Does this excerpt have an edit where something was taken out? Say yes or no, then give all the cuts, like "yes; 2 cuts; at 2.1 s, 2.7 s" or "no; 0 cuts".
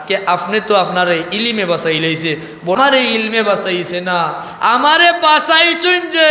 yes; 1 cut; at 2.8 s